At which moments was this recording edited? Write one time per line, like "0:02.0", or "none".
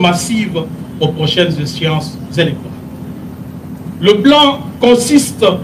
none